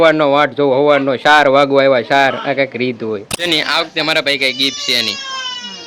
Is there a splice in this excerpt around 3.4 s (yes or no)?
yes